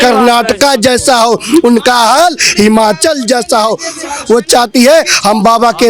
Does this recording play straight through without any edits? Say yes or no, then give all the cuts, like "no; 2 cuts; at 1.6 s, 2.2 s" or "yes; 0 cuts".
yes; 0 cuts